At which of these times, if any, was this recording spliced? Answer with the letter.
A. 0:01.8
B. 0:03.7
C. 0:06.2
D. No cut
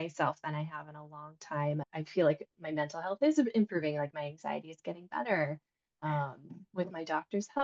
A